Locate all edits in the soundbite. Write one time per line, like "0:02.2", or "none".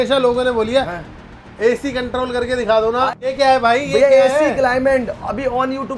0:03.3